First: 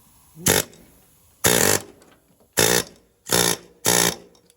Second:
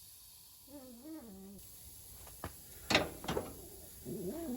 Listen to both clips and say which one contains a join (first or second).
second